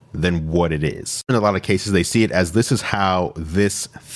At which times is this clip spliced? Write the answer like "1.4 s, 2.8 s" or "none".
1.3 s